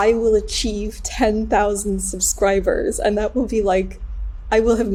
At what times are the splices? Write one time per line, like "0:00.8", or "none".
none